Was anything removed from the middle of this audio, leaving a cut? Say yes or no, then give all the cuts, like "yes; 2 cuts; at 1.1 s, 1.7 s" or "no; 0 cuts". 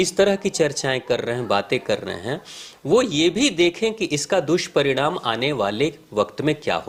no; 0 cuts